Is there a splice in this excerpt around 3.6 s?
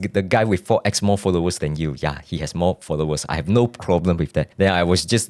no; 0 cuts

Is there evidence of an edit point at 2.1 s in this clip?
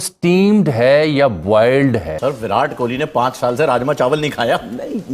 yes; 1 cut; at 2.1 s

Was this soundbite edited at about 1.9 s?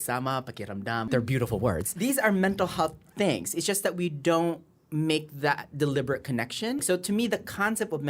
yes; 3 cuts; at 1.1 s, 1.9 s, 6.8 s

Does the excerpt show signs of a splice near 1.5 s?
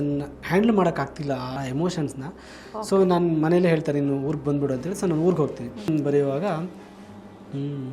yes; 2 cuts; at 1.5 s, 5.9 s

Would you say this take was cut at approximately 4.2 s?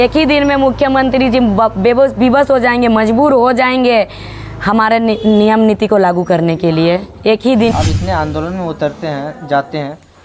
no; 1 cut; at 7.7 s

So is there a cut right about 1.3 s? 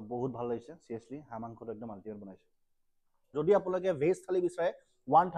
no; 1 cut; at 3.3 s

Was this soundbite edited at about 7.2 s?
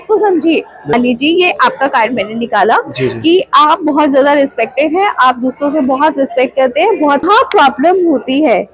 yes; 2 cuts; at 0.9 s, 7.2 s

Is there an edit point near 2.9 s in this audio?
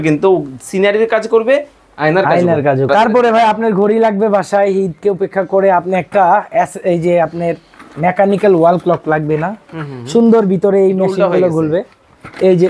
yes; 1 cut; at 2.9 s

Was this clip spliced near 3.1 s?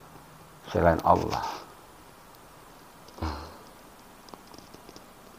yes; 1 cut; at 3.1 s

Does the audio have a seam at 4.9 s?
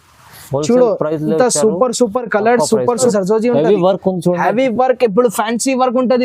no; 1 cut; at 3.1 s

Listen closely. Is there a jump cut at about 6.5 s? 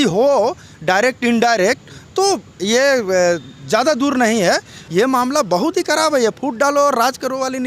no; 1 cut; at 4.8 s

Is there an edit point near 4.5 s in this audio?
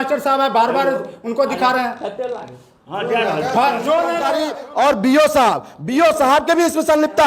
yes; 1 cut; at 4.5 s

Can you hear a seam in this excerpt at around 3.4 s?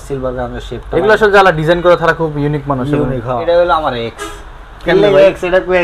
yes; 1 cut; at 3.4 s

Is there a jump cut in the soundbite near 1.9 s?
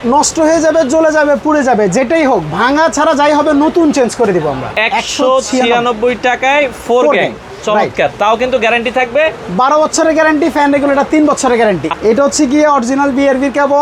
no; 2 cuts; at 4.7 s, 11.9 s

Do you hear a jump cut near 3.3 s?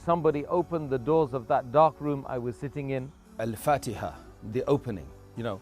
yes; 1 cut; at 3.3 s

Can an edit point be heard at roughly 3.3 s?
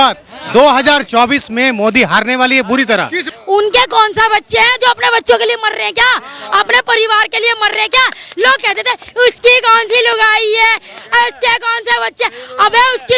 yes; 1 cut; at 3.3 s

